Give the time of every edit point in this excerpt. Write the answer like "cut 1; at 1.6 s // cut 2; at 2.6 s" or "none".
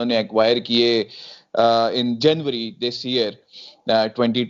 none